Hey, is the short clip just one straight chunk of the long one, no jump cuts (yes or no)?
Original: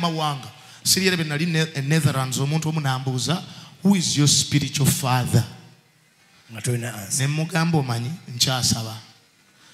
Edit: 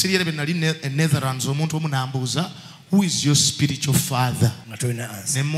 no